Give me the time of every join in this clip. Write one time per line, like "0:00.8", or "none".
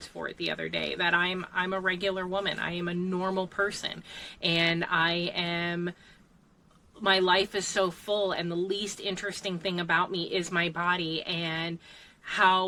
none